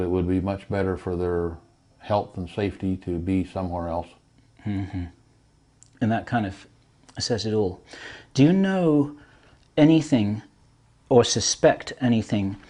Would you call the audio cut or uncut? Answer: uncut